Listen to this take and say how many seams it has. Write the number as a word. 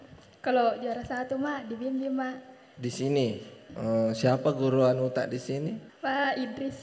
two